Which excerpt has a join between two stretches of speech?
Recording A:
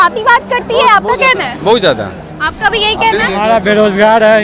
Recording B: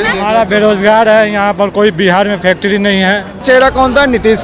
B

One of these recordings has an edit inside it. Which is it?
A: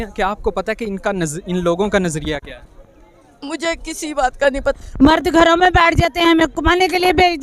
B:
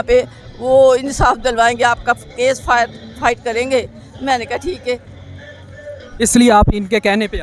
A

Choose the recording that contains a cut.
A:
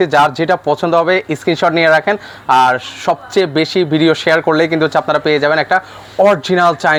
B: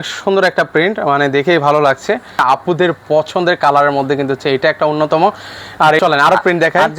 B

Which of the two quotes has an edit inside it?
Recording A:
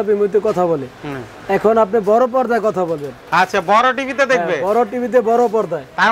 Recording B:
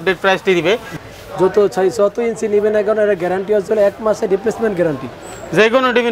B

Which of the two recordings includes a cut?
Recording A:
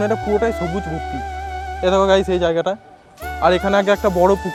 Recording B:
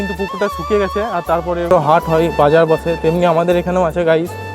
B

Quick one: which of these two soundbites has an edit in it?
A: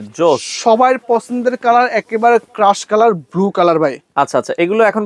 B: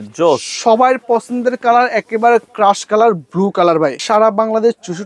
B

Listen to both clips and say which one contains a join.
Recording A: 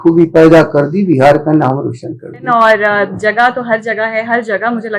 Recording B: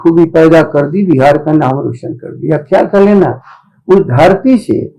A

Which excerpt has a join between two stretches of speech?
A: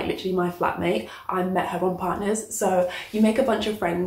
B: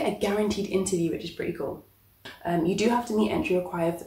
B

